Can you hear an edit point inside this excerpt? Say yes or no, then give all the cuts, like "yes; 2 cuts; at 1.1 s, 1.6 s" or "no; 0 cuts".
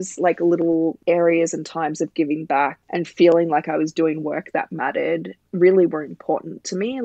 yes; 3 cuts; at 1.0 s, 2.8 s, 5.4 s